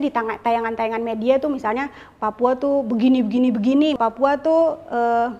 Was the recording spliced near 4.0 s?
yes; 1 cut; at 4.0 s

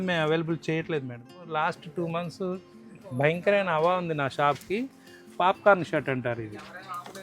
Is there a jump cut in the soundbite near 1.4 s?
yes; 1 cut; at 1.4 s

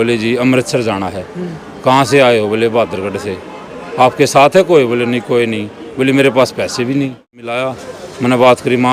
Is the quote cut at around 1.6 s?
no; 1 cut; at 7.6 s

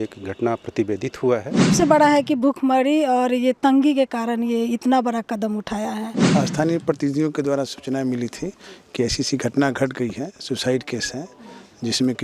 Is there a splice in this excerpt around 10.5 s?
no; 2 cuts; at 1.7 s, 6.3 s

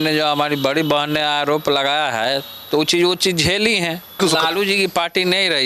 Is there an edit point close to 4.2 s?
yes; 1 cut; at 4.2 s

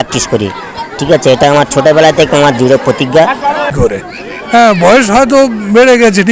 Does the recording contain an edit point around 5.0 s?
no; 1 cut; at 3.7 s

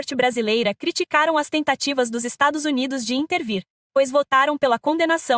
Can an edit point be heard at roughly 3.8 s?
no; 0 cuts

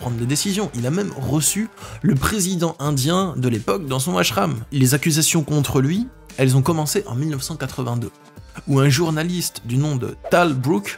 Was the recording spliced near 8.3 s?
no; 1 cut; at 4.7 s

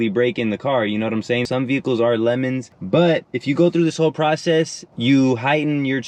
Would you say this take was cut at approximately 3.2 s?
no; 1 cut; at 1.5 s

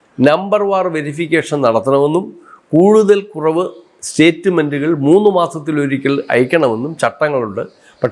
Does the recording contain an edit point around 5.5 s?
no; 0 cuts

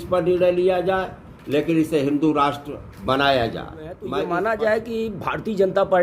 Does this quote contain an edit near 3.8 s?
yes; 1 cut; at 3.8 s

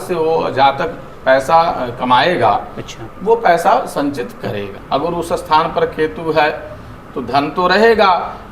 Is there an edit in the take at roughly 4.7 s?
yes; 1 cut; at 4.7 s

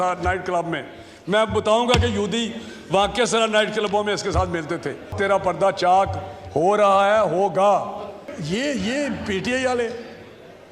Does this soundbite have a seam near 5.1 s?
yes; 2 cuts; at 5.1 s, 8.3 s

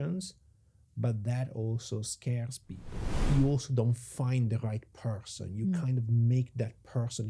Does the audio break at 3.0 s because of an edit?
yes; 1 cut; at 3.0 s

